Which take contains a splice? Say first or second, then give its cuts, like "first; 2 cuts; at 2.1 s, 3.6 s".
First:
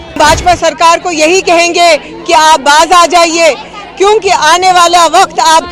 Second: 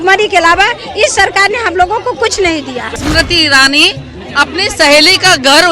second; 1 cut; at 3.0 s